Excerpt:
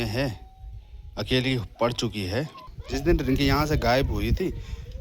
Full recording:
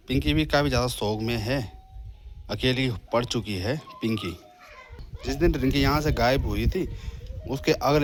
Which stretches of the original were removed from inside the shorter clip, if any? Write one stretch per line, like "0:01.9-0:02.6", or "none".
0:03.9-0:04.9

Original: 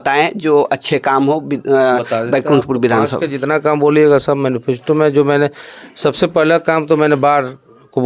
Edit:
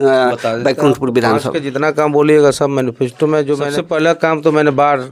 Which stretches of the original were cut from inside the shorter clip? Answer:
0:05.4-0:06.2

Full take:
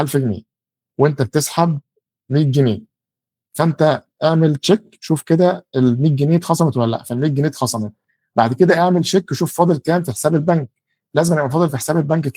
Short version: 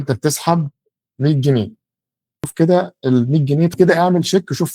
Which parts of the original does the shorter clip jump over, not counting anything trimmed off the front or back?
0:03.6-0:05.2
0:06.4-0:08.5

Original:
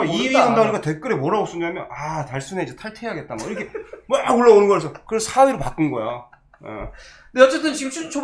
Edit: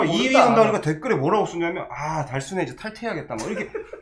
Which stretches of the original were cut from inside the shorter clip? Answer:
none

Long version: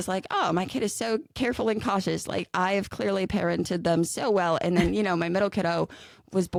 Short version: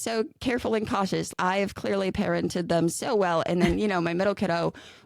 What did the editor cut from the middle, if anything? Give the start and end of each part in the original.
0:02.3-0:02.5

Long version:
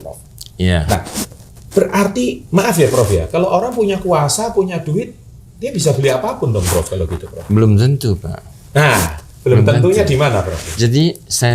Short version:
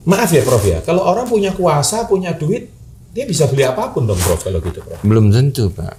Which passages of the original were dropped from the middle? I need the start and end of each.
none

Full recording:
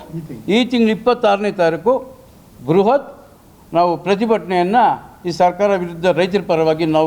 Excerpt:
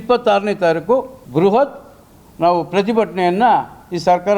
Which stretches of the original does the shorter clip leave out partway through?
0:02.1-0:02.5

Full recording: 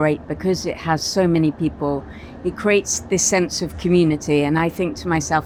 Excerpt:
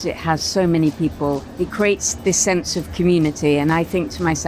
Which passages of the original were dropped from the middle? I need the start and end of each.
0:02.1-0:02.3

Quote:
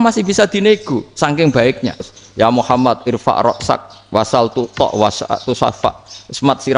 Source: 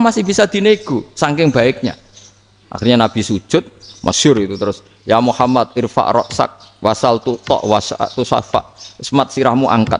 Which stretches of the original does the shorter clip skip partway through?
0:02.2-0:04.9

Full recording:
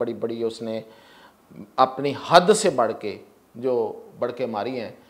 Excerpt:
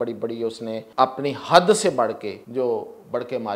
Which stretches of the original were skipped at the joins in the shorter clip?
0:00.9-0:01.7
0:03.1-0:03.4

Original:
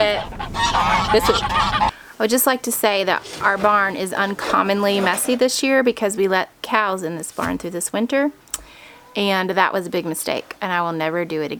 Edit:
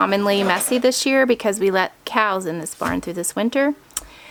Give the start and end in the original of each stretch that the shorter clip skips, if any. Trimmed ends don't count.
none

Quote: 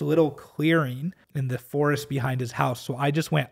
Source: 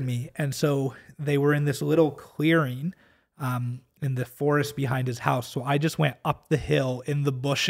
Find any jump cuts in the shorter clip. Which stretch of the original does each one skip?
0:03.1-0:04.0

